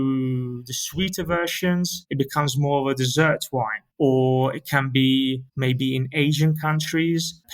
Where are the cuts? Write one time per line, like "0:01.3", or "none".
0:02.0
0:03.8
0:05.5